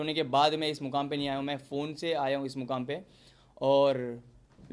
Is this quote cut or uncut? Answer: uncut